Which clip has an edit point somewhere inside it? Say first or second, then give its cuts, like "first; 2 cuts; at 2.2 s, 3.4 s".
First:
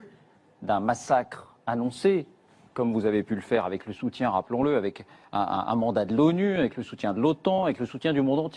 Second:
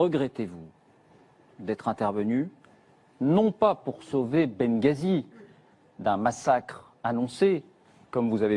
second; 1 cut; at 4.1 s